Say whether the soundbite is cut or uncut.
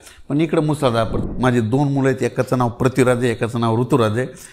cut